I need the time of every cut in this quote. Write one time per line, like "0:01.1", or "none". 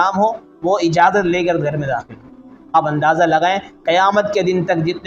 0:02.7